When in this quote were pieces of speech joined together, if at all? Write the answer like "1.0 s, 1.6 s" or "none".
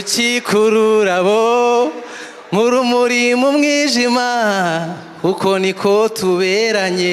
none